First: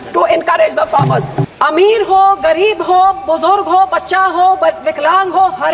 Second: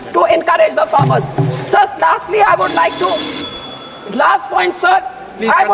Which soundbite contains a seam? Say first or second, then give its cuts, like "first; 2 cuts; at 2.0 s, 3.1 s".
first; 1 cut; at 1.4 s